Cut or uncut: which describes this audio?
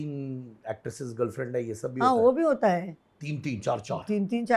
uncut